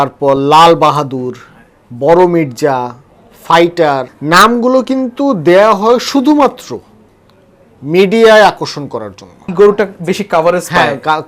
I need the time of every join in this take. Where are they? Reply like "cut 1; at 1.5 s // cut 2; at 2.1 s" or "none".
cut 1; at 4.1 s // cut 2; at 9.5 s